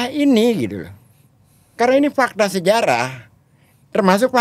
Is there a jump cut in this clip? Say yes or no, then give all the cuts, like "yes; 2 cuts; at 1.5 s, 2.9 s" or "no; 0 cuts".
no; 0 cuts